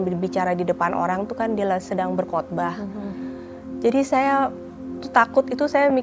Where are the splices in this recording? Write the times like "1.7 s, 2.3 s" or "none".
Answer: none